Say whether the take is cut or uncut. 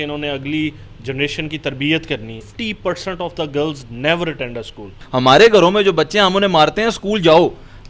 cut